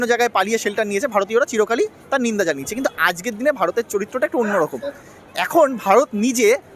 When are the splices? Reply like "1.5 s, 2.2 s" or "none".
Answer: none